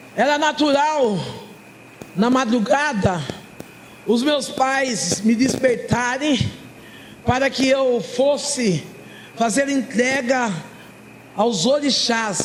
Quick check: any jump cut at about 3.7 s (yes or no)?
no